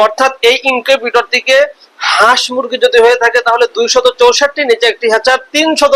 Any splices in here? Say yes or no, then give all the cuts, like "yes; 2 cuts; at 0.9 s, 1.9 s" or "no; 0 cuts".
no; 0 cuts